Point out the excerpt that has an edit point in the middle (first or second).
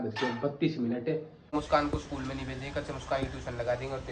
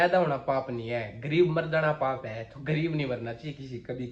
first